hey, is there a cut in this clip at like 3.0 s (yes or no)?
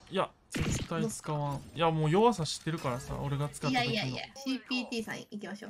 no